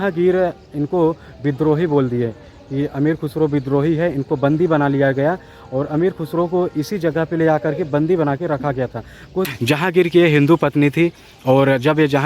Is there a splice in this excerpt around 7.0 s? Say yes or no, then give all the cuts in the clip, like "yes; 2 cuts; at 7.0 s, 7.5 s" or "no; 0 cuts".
no; 1 cut; at 9.5 s